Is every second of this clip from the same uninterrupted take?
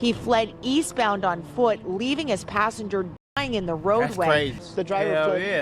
no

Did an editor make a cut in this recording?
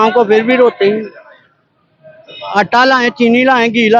no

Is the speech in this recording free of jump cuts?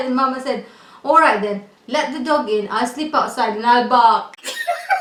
yes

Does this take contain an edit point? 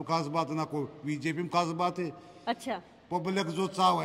no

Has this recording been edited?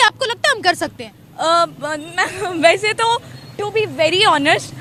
no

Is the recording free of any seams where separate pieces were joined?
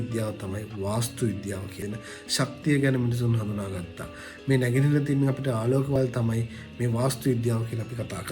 no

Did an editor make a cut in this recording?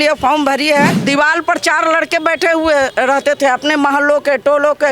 yes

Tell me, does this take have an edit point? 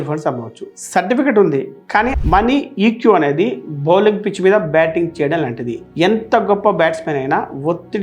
yes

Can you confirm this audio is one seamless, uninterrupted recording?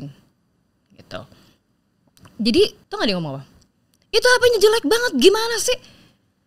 no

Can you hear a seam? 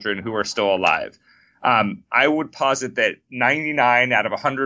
no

